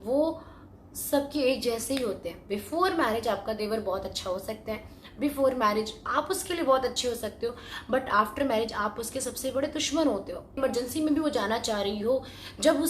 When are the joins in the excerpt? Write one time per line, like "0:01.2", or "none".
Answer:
0:10.6